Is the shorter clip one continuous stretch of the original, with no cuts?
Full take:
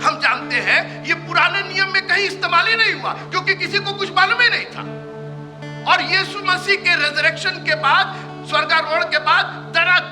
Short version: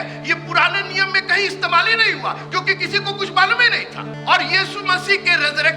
no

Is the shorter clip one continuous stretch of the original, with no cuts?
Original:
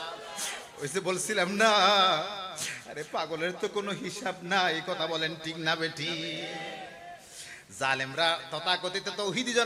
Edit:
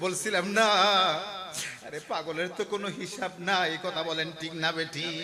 yes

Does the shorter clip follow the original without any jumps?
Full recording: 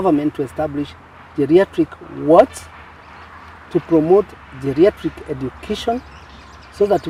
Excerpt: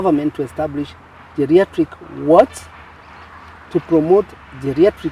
yes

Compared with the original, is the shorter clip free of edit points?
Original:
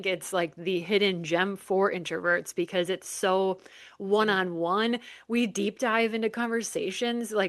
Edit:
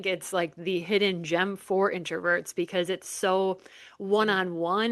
yes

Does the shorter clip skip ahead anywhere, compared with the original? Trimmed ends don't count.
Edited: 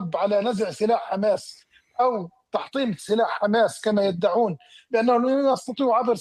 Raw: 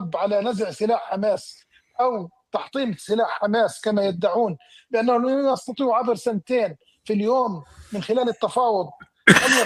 no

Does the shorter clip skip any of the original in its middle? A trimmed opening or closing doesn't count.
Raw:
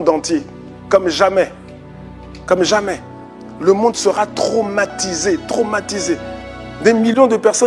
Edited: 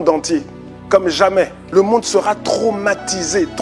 yes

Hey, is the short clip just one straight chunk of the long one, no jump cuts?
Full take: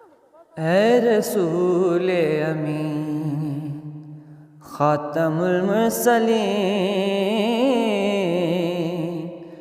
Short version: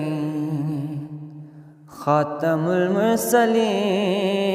yes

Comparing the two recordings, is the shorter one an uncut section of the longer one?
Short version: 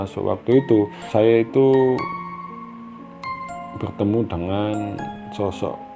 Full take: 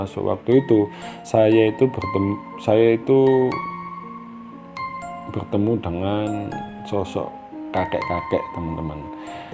no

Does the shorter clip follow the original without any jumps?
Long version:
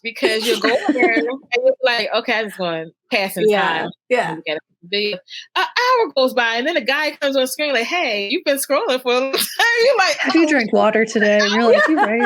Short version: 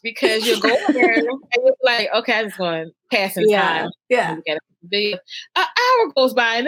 yes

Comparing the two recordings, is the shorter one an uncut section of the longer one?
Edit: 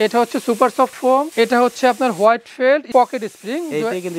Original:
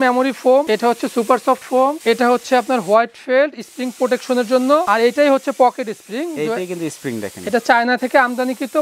no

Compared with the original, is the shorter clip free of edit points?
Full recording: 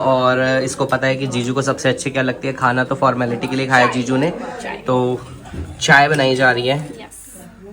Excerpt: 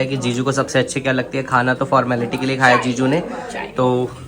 yes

